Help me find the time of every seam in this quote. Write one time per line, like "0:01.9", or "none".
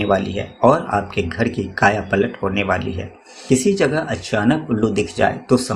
0:03.4